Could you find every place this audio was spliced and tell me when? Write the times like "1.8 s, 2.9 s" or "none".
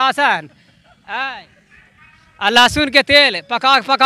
none